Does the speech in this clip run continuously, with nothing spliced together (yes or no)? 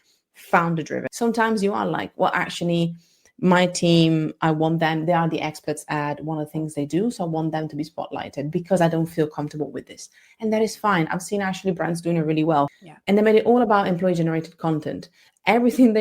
no